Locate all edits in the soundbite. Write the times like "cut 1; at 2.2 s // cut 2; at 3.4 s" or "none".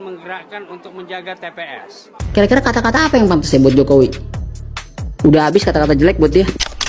cut 1; at 2.2 s